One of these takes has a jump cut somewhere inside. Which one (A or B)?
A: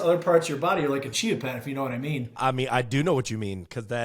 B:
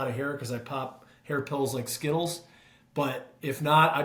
A